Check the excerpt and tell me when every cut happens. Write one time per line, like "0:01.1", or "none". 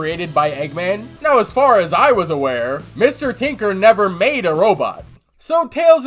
0:01.1
0:05.0